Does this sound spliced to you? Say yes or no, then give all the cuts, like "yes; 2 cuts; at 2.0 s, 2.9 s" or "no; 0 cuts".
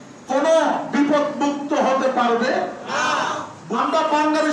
yes; 1 cut; at 3.6 s